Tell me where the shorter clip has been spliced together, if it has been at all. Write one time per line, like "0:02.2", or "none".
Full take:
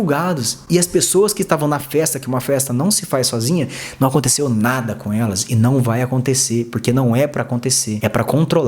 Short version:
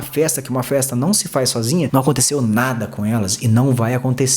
0:01.9